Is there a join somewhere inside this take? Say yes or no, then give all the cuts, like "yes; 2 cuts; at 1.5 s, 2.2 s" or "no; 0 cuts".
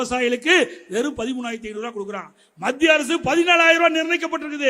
no; 0 cuts